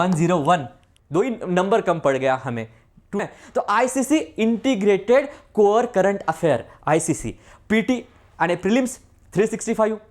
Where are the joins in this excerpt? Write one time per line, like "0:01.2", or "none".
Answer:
0:03.2

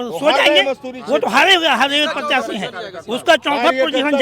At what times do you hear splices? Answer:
none

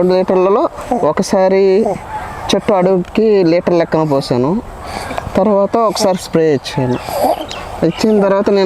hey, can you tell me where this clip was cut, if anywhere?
none

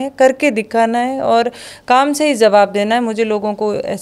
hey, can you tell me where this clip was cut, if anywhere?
none

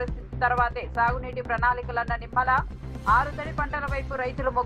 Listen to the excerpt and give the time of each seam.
none

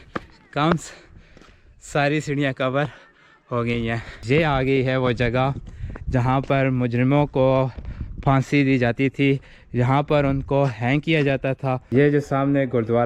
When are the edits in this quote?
0:04.2
0:11.8

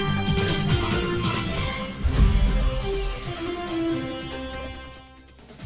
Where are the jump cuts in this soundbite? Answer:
0:02.1
0:04.6

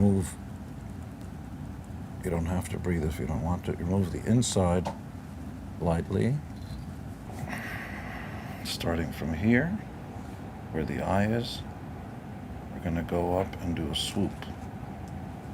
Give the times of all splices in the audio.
0:07.3

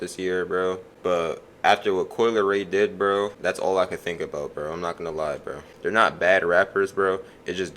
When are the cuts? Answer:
0:00.9
0:03.3
0:05.7

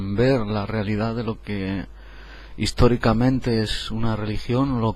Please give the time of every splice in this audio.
0:03.8

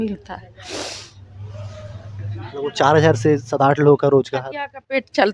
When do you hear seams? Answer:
none

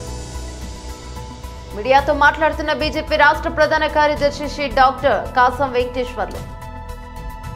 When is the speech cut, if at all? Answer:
none

